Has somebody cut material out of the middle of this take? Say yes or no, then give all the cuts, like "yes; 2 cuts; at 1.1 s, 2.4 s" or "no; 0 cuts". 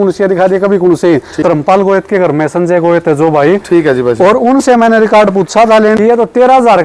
yes; 2 cuts; at 1.4 s, 6.0 s